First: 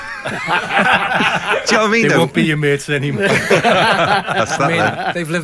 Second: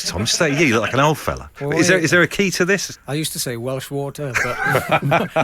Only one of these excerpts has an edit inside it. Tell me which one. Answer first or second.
second